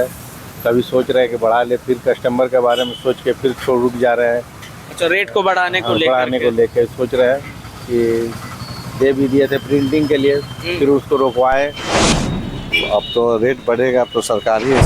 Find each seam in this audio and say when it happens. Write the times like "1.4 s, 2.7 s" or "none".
12.3 s